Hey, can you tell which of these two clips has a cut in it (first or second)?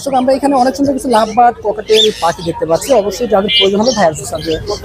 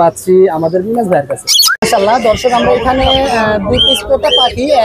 second